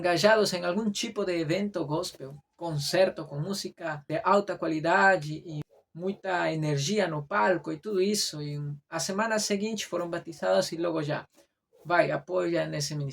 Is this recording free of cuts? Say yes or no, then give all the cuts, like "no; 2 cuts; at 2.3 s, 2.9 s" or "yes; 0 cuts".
no; 2 cuts; at 3.9 s, 5.6 s